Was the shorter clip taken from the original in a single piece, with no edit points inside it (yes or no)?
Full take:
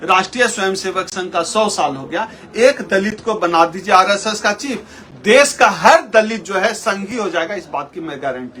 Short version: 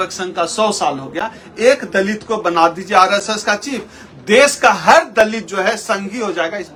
yes